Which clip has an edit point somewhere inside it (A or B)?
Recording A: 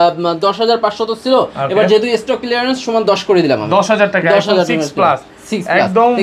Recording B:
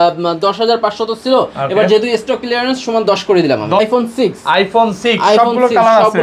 B